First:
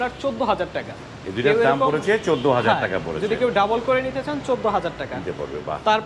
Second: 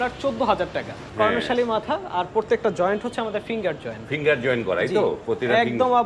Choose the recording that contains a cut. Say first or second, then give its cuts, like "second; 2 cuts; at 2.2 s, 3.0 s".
second; 1 cut; at 1.0 s